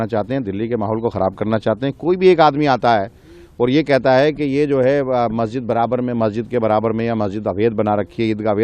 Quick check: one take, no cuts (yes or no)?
yes